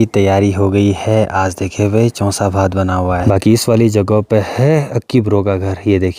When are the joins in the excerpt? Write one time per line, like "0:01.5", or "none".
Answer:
0:03.2